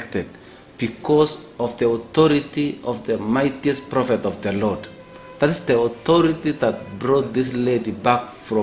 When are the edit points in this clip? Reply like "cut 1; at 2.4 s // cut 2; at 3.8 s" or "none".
none